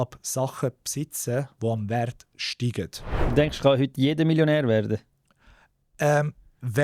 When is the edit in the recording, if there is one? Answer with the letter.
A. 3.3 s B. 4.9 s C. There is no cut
A